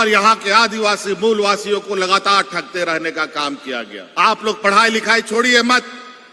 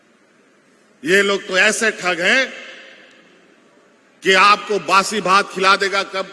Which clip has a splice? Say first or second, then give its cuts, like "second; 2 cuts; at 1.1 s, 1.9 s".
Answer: first; 1 cut; at 4.0 s